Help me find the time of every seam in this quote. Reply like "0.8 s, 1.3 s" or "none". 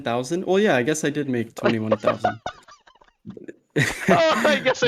none